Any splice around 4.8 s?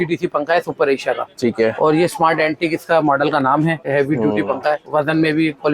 yes; 2 cuts; at 3.9 s, 4.8 s

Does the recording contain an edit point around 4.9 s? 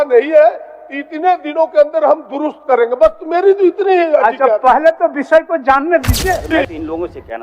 no; 1 cut; at 6.5 s

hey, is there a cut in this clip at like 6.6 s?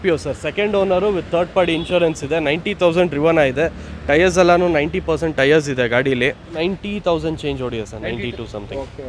yes; 1 cut; at 6.6 s

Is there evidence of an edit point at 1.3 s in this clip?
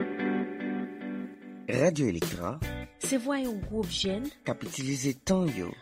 yes; 1 cut; at 1.3 s

